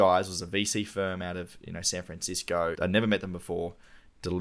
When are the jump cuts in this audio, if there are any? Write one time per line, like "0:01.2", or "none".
0:02.8